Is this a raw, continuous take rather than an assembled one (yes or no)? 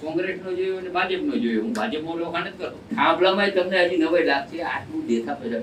no